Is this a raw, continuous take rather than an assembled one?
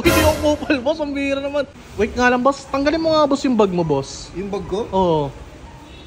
no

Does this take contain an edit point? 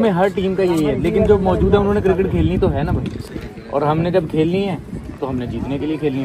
no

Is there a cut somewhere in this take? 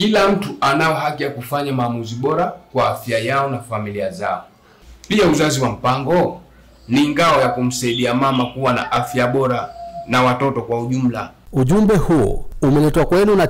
yes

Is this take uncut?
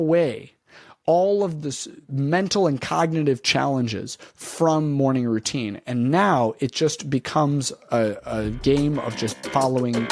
yes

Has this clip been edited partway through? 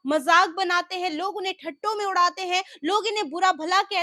no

